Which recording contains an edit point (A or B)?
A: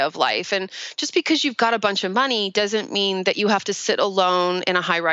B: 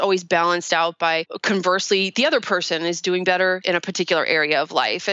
B